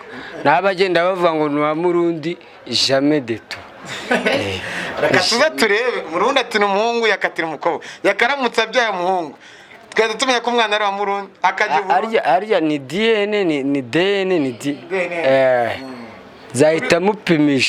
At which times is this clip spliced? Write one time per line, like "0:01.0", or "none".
none